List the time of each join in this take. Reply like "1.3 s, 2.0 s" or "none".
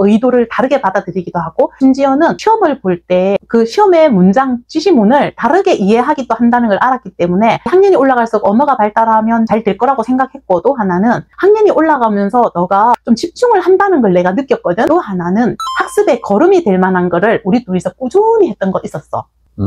14.9 s